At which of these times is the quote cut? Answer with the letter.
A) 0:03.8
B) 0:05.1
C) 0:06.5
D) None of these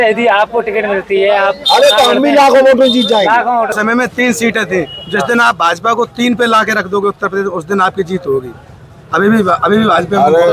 A